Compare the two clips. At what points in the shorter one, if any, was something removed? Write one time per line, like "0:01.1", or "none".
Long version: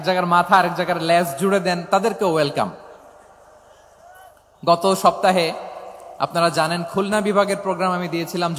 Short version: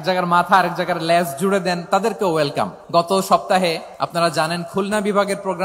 0:02.8
0:03.9